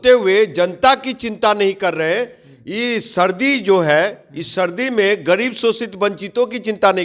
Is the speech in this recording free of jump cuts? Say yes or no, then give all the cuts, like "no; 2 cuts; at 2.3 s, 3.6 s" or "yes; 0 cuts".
yes; 0 cuts